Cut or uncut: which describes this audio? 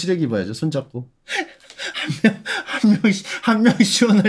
uncut